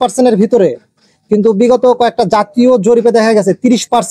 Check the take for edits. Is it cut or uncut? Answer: uncut